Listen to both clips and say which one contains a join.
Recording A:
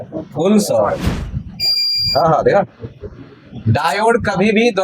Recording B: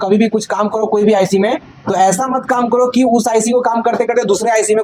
A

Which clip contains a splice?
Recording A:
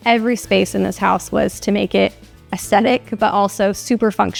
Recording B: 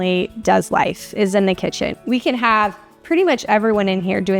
B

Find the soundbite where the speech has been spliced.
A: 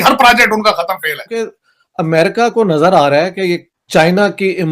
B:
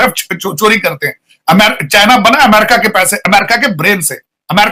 A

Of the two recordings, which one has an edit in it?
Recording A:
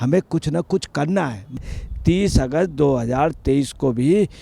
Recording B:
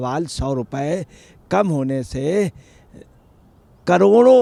A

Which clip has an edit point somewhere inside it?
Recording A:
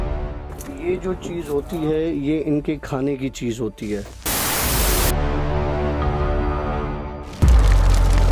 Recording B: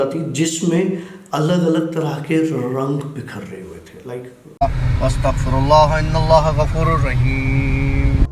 B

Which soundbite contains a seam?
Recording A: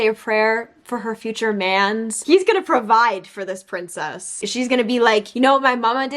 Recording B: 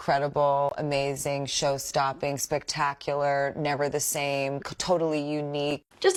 A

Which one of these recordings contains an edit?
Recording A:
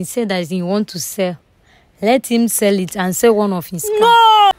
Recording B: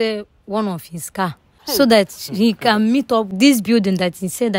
B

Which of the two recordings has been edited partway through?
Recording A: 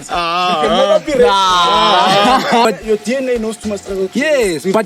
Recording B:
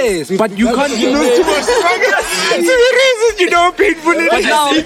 A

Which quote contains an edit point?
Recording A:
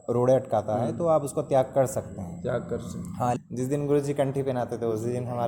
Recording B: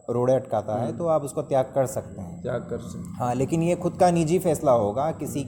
A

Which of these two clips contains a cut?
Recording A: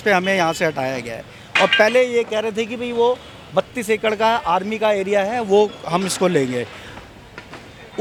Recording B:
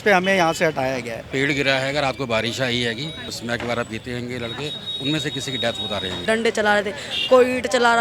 B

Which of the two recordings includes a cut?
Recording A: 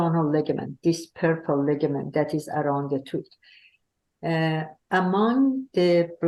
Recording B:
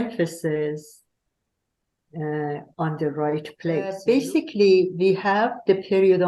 B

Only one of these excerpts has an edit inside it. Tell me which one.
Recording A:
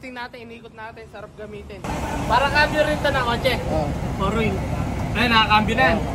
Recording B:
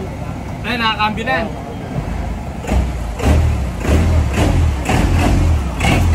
A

